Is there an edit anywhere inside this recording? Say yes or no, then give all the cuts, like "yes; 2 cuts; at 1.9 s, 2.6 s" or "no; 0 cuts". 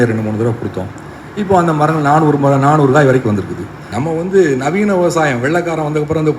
yes; 1 cut; at 3.9 s